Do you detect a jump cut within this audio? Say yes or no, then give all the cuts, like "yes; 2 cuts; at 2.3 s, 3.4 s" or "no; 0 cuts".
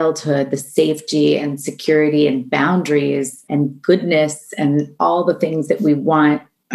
yes; 1 cut; at 3.4 s